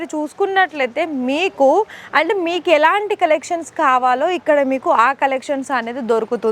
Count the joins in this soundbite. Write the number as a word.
zero